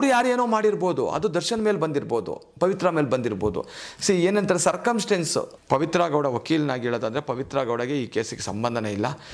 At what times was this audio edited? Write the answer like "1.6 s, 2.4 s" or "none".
5.6 s